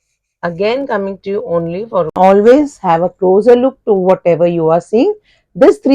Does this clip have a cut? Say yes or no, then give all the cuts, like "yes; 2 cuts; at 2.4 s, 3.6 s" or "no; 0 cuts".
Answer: yes; 1 cut; at 2.1 s